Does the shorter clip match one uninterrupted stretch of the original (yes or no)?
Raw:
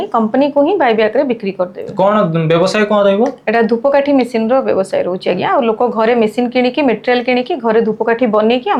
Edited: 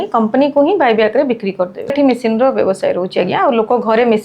no